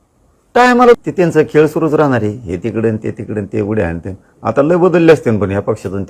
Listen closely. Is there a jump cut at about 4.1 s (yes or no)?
no